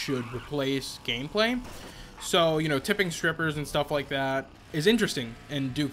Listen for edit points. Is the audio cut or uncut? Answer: cut